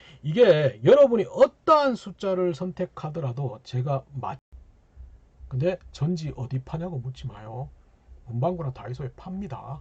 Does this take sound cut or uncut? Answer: cut